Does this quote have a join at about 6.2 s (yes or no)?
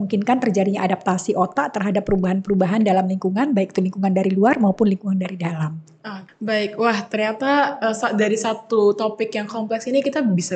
yes